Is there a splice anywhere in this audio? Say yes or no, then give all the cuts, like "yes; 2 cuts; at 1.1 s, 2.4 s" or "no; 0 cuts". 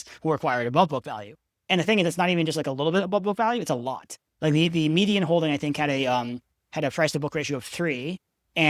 no; 0 cuts